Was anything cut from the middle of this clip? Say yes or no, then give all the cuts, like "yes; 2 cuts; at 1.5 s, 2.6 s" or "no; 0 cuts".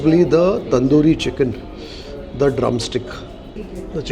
no; 0 cuts